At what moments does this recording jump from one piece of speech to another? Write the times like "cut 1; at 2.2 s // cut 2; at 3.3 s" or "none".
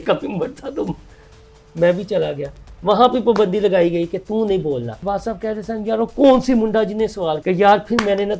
cut 1; at 5.0 s // cut 2; at 7.4 s